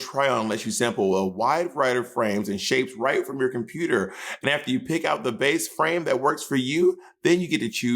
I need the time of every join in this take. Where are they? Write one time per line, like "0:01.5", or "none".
none